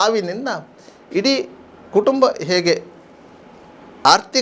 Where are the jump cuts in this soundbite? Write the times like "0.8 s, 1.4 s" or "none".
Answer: none